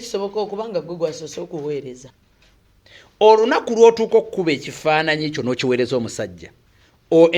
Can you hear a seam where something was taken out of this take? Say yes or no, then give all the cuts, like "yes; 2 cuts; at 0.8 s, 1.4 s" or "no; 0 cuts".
yes; 1 cut; at 2.0 s